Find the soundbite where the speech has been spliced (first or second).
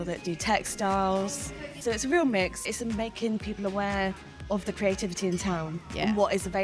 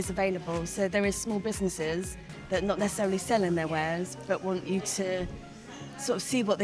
first